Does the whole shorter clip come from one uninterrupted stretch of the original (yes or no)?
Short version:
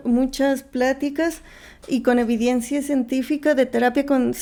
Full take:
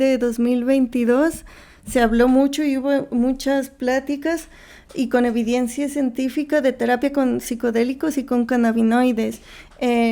yes